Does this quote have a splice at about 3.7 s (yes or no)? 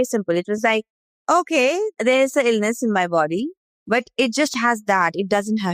yes